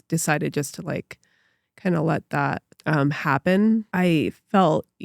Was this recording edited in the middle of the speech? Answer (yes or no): yes